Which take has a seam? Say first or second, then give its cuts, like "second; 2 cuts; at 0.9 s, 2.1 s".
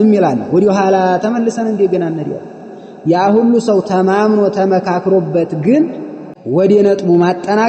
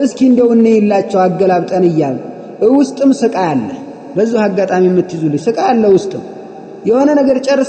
first; 1 cut; at 6.6 s